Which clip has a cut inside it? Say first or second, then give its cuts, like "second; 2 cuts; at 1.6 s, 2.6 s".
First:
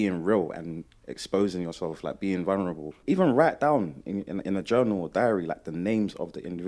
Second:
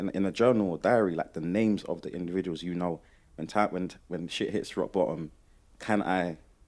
first; 1 cut; at 2.9 s